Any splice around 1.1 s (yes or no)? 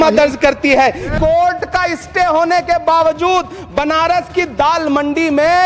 yes